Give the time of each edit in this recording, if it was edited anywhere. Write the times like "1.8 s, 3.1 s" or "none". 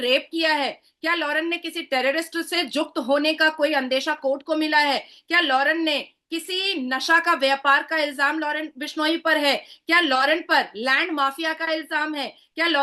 none